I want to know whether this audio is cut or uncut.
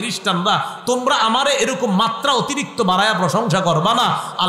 uncut